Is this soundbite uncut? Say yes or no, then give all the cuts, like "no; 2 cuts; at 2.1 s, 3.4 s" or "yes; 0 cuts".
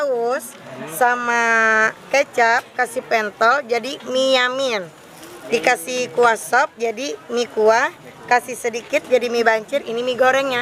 yes; 0 cuts